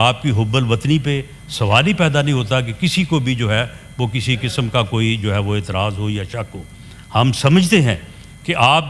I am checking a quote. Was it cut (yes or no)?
no